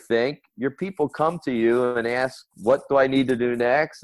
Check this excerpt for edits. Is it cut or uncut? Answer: uncut